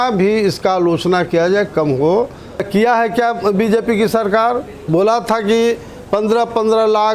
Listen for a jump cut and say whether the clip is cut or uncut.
cut